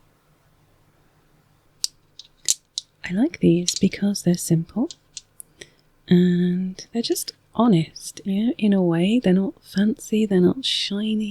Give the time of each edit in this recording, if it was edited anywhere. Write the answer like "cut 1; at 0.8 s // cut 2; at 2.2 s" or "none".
cut 1; at 1.6 s